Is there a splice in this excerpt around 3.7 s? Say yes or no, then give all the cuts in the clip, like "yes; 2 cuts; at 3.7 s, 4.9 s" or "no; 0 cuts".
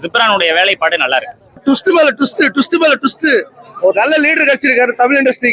no; 1 cut; at 1.6 s